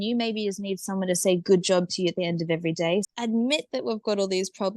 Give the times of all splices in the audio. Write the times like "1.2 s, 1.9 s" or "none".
3.1 s

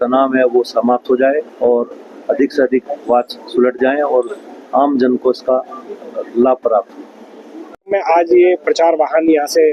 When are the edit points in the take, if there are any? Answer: 7.9 s

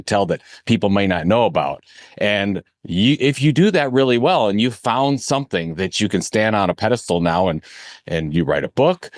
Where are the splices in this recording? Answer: none

